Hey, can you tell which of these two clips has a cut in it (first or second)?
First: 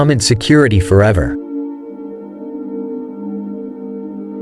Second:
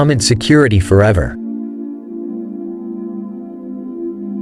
first